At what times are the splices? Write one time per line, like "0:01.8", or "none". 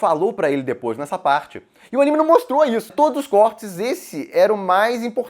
0:02.9